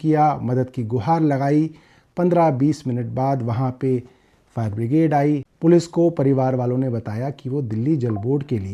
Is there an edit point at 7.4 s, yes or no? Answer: no